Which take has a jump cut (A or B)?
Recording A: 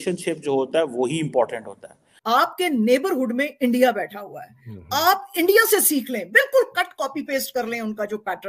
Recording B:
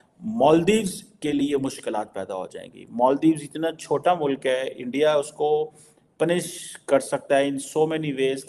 A